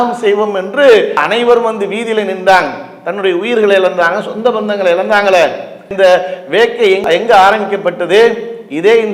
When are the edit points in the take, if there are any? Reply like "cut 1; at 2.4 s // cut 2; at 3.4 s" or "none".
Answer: none